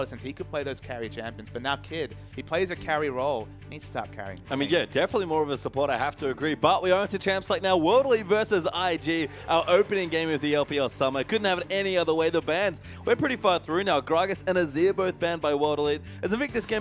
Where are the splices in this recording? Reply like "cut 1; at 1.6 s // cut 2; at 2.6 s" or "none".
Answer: none